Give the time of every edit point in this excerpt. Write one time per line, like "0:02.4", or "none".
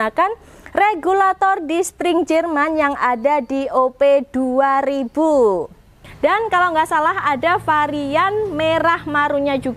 0:06.0